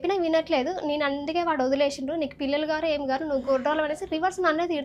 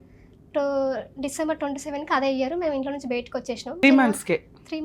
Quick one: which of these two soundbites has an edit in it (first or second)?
second